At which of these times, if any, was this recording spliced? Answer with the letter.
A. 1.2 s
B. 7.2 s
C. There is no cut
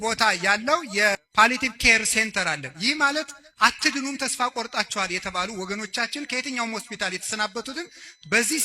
A